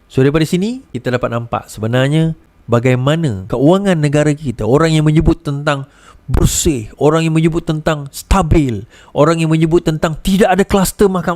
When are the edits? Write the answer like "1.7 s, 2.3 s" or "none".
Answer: 0.9 s, 2.5 s, 3.4 s